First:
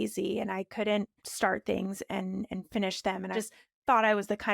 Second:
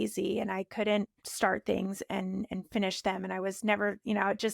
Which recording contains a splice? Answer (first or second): first